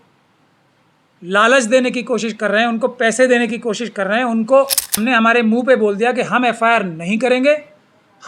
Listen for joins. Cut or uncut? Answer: cut